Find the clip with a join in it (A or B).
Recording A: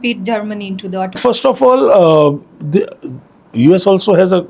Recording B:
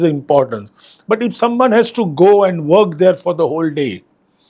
A